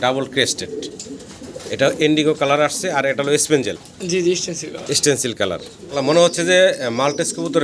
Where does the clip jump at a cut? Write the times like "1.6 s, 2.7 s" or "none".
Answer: 5.8 s